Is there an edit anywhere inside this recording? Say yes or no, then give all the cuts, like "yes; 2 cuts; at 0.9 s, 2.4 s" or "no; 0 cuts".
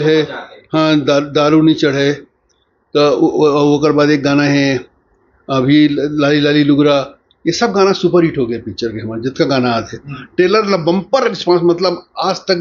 no; 0 cuts